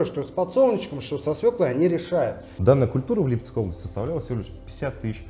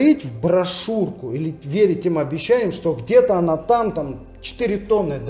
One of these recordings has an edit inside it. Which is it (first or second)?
first